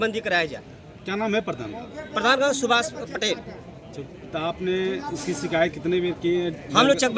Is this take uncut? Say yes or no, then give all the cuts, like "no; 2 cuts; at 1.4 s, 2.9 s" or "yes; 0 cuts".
yes; 0 cuts